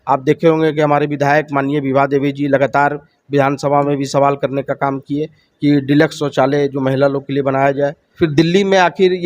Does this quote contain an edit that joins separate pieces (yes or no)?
yes